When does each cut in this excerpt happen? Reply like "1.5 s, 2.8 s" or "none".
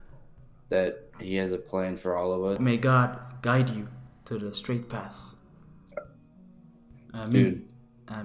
2.6 s